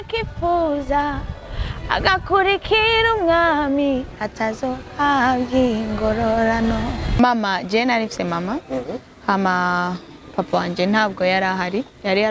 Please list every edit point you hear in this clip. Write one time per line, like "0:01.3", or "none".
0:07.0